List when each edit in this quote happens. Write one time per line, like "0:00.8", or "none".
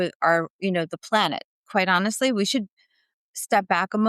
0:01.5